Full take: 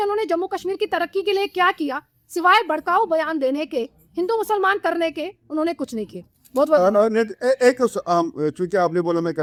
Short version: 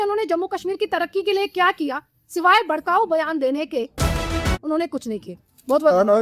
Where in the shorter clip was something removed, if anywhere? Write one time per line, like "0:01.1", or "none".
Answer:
0:04.2